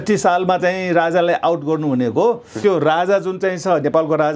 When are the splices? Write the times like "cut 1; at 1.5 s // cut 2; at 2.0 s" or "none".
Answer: cut 1; at 2.5 s